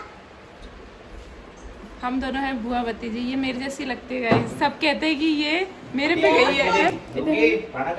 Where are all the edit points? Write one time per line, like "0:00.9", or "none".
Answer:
0:06.5